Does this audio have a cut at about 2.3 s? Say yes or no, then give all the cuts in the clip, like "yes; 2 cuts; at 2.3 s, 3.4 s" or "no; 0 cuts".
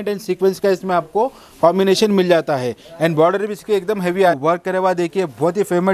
no; 1 cut; at 4.4 s